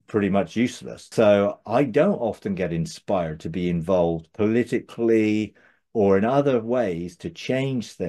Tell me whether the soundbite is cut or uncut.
cut